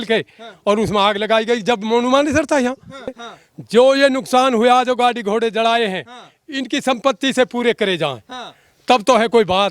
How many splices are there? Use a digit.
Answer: 1